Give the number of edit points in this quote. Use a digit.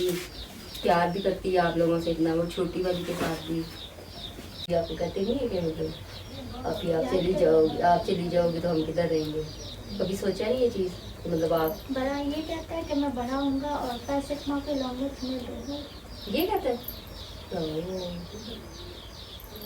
1